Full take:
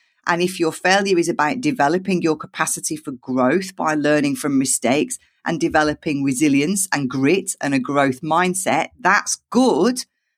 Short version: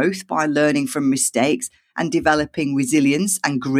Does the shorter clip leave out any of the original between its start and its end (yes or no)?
no